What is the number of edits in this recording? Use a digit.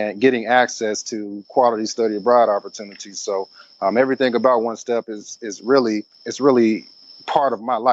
1